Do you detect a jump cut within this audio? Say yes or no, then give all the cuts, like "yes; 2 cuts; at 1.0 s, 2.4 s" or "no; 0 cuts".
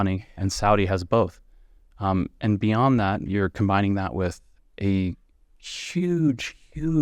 no; 0 cuts